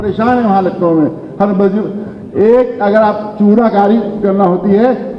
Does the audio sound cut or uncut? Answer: uncut